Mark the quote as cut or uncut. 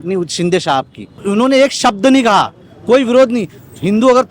cut